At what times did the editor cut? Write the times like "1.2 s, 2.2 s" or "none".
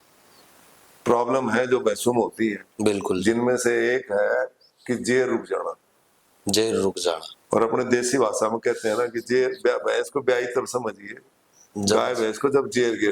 none